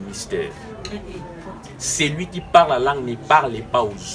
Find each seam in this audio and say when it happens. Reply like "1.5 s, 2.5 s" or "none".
none